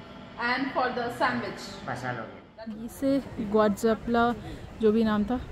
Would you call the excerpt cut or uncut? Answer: cut